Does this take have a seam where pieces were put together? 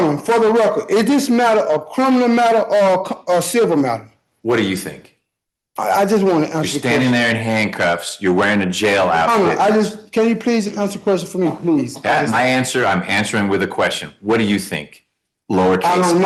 no; 0 cuts

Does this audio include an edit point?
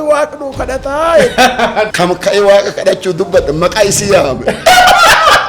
yes; 1 cut; at 1.9 s

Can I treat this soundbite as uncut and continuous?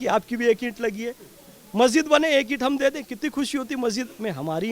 yes; 0 cuts

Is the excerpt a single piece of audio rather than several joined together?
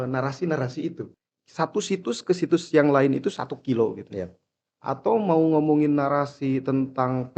no; 1 cut; at 1.0 s

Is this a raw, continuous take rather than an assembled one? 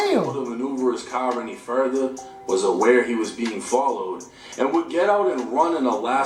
yes; 0 cuts

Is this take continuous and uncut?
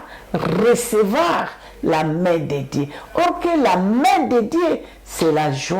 yes; 0 cuts

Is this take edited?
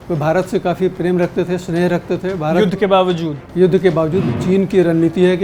yes; 2 cuts; at 0.9 s, 4.3 s

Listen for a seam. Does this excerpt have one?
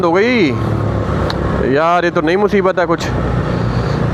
no; 0 cuts

